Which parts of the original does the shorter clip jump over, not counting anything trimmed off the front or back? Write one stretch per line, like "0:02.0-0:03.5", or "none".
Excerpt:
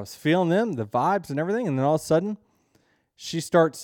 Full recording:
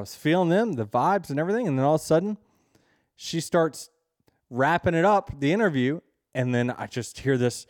none